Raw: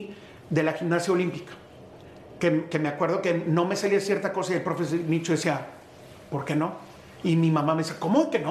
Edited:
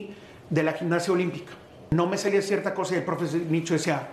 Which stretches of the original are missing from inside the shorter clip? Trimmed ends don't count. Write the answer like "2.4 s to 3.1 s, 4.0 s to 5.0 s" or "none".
1.9 s to 3.4 s